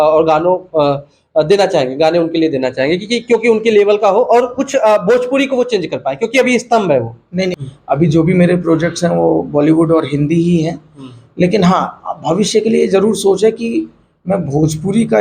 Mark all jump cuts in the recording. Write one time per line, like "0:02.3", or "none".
0:07.7